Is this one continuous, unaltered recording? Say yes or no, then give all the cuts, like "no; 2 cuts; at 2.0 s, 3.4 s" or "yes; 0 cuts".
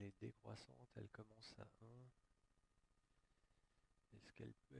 no; 1 cut; at 1.0 s